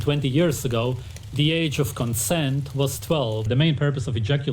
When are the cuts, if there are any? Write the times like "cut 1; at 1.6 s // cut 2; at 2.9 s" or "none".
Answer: cut 1; at 3.5 s